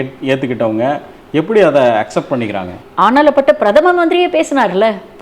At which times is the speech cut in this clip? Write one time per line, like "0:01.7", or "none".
0:02.8